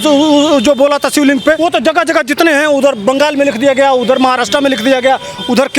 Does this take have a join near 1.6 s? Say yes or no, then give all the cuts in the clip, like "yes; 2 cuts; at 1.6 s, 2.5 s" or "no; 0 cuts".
yes; 1 cut; at 1.6 s